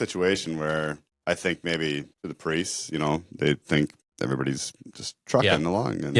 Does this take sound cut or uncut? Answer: cut